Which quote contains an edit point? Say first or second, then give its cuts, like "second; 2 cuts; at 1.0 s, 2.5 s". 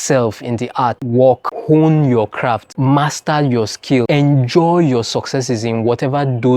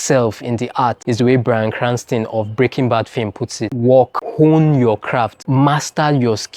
first; 1 cut; at 1.0 s